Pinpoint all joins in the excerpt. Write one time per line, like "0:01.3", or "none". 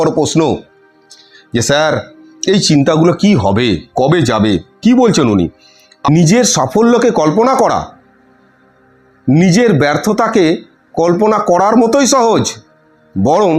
0:06.1